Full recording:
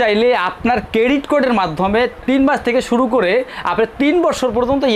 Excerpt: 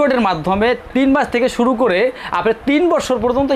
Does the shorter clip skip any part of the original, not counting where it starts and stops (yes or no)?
no